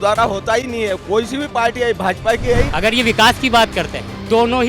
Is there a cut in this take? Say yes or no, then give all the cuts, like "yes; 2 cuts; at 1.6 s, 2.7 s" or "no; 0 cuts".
yes; 1 cut; at 2.7 s